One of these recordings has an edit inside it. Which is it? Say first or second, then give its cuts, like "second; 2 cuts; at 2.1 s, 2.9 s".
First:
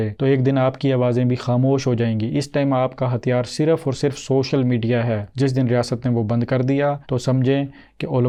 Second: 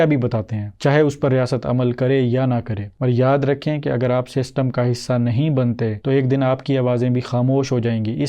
second; 1 cut; at 2.8 s